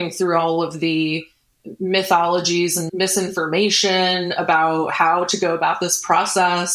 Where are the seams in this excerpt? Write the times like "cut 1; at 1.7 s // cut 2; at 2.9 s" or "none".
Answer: cut 1; at 2.9 s